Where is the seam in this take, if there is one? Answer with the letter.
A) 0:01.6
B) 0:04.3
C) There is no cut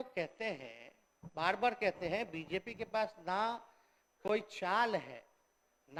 C